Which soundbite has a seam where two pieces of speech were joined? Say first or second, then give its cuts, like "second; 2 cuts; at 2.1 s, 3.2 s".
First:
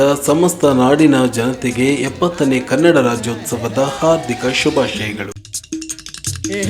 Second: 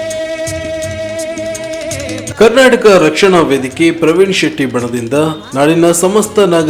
first; 1 cut; at 5.3 s